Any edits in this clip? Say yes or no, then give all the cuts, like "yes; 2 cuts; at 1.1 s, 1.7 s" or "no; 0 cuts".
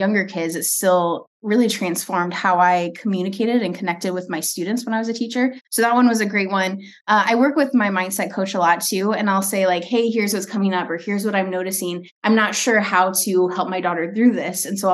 yes; 2 cuts; at 5.6 s, 12.1 s